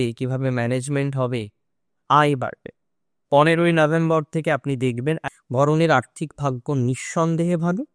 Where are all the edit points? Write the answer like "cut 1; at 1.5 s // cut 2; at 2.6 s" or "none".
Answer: cut 1; at 5.3 s